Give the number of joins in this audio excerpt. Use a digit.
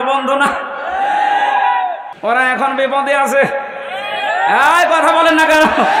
1